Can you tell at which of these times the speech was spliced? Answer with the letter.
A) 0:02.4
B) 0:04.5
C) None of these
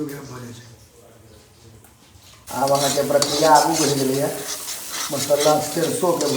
A